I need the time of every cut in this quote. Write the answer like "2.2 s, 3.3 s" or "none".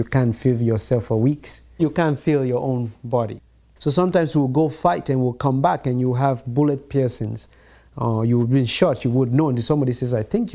1.8 s, 3.4 s